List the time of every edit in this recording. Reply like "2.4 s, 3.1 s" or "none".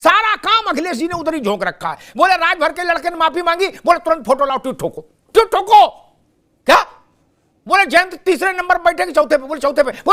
none